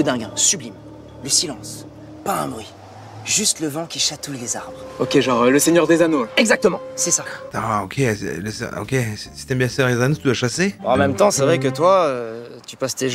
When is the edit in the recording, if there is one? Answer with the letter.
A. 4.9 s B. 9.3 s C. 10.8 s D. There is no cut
C